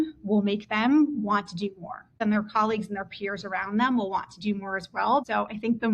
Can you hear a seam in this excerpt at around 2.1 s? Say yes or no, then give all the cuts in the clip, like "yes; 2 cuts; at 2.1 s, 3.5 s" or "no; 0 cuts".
yes; 2 cuts; at 2.1 s, 5.2 s